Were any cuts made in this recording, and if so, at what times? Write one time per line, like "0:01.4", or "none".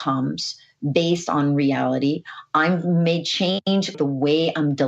0:03.9